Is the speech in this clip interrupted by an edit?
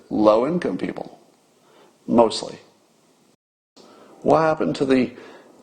yes; 1 cut; at 3.6 s

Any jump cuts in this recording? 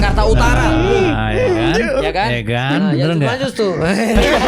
no; 0 cuts

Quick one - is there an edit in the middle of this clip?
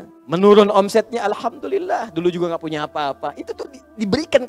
no; 0 cuts

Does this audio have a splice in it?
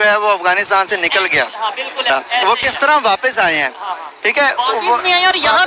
yes; 1 cut; at 2.1 s

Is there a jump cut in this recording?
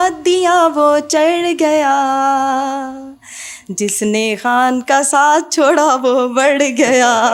no; 0 cuts

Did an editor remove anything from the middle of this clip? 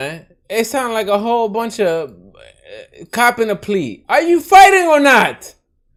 no; 0 cuts

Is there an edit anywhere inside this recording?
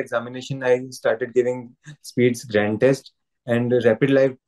no; 0 cuts

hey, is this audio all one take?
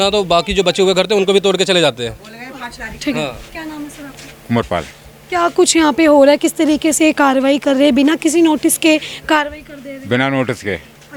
yes; 0 cuts

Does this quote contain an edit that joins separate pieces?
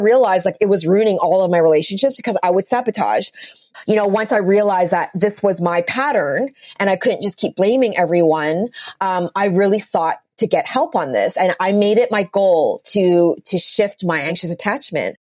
yes; 2 cuts; at 3.7 s, 14.3 s

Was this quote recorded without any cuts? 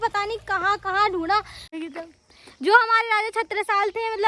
no; 1 cut; at 1.7 s

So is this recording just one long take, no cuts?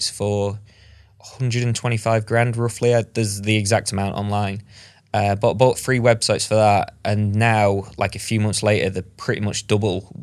yes; 0 cuts

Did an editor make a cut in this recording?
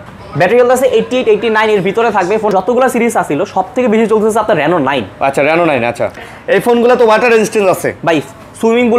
yes; 2 cuts; at 2.5 s, 6.3 s

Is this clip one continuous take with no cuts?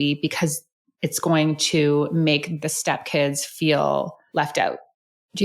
no; 1 cut; at 2.6 s

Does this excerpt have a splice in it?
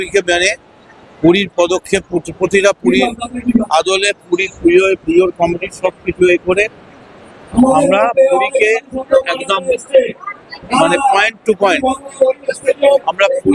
no; 0 cuts

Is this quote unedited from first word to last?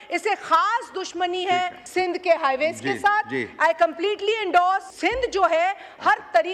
no; 2 cuts; at 1.8 s, 4.9 s

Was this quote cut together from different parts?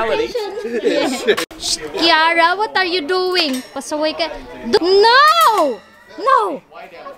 yes; 2 cuts; at 1.5 s, 4.8 s

